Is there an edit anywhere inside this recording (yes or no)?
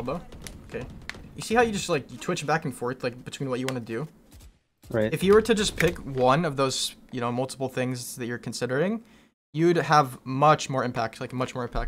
no